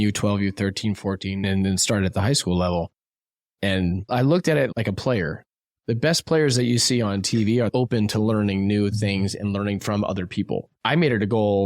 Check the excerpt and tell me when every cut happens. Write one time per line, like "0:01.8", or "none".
0:07.7
0:10.7